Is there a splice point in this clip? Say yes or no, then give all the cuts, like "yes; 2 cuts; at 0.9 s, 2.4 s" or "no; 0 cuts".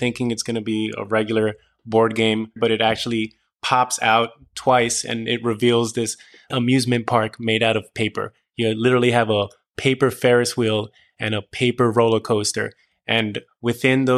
yes; 1 cut; at 2.6 s